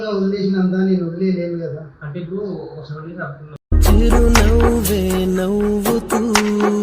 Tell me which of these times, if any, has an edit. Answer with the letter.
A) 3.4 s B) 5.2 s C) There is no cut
A